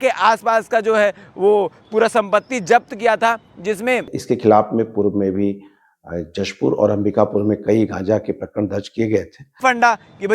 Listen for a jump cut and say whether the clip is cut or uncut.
cut